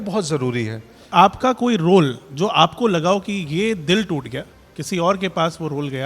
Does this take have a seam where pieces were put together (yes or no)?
yes